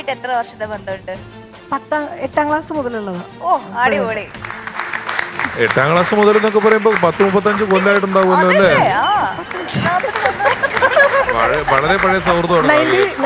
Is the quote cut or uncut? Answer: uncut